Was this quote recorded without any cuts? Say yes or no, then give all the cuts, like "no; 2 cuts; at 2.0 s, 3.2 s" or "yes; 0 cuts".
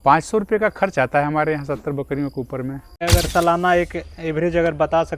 no; 1 cut; at 3.0 s